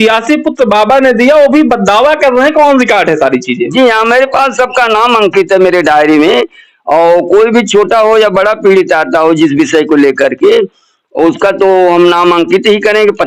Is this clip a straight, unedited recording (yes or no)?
yes